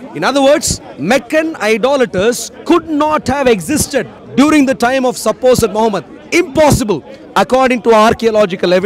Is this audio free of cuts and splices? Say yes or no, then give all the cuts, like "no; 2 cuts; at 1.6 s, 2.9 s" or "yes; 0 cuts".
no; 1 cut; at 4.2 s